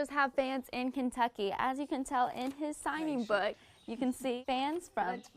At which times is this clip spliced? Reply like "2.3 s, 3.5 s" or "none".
none